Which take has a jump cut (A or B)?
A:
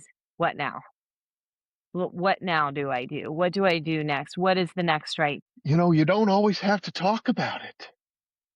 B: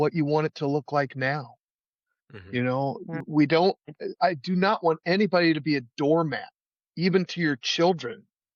A